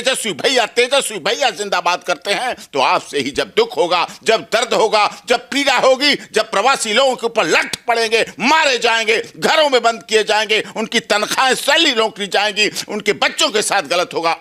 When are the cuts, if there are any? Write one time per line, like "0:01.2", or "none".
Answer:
none